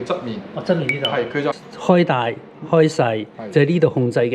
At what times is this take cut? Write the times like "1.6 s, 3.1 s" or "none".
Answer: 1.6 s